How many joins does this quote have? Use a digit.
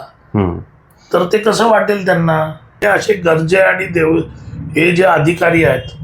1